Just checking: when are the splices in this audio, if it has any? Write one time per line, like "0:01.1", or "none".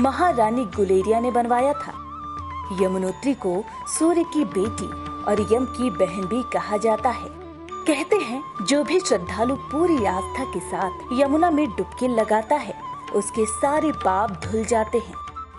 none